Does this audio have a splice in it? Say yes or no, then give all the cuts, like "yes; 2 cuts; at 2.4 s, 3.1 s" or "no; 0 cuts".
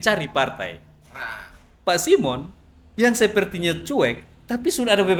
no; 0 cuts